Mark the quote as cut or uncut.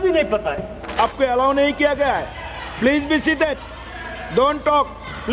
cut